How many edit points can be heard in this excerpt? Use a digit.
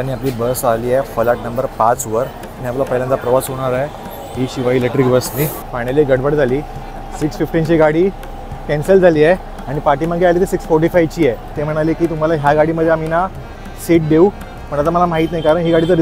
2